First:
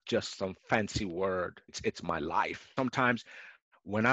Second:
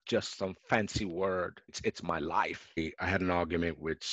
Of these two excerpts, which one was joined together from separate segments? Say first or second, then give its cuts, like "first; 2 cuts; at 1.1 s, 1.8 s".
second; 1 cut; at 2.8 s